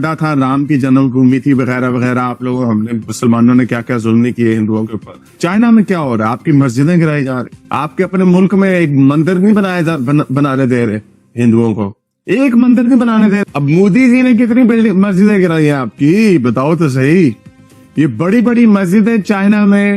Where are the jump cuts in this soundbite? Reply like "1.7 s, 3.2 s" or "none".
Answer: none